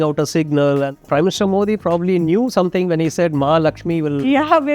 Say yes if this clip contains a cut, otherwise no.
yes